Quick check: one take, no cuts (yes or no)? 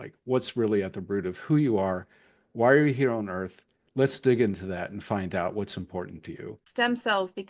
no